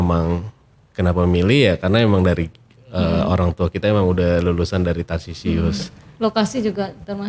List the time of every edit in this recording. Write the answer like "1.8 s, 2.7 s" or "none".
none